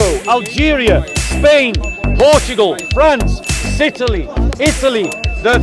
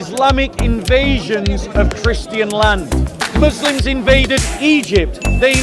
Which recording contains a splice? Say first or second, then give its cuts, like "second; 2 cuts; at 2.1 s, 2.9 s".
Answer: second; 1 cut; at 3.2 s